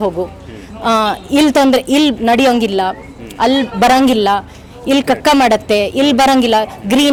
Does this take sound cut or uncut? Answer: uncut